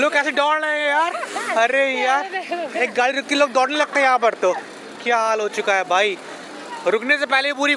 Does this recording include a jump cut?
no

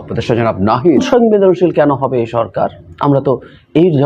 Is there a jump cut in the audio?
yes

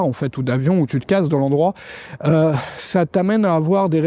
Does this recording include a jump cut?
no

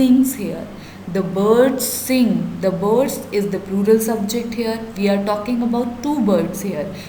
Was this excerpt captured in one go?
yes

